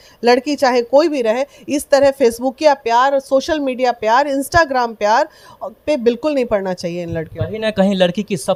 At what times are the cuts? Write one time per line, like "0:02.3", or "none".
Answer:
none